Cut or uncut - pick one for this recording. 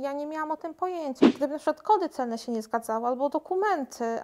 cut